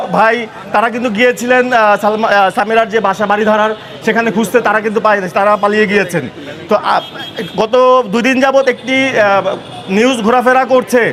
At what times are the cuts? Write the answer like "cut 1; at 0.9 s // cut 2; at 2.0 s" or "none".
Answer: none